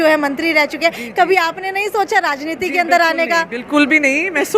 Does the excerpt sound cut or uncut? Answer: uncut